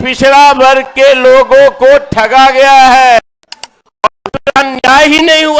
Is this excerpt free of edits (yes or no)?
no